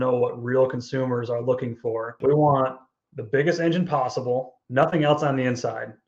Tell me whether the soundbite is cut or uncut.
cut